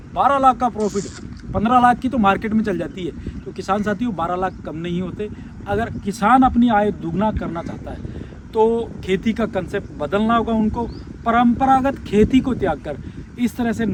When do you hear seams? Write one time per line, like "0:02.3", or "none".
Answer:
none